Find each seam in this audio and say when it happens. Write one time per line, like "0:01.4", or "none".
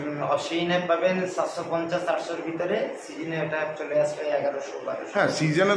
none